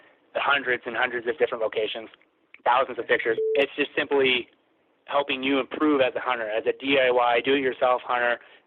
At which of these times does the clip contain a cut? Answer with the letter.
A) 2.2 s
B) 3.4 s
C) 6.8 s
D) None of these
B